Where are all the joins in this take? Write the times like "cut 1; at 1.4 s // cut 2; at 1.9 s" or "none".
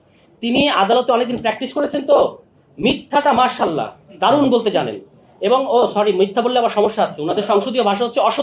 none